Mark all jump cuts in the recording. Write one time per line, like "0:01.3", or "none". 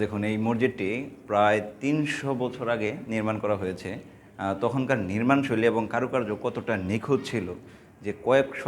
none